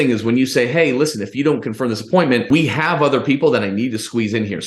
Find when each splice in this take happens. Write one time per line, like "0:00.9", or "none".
0:02.5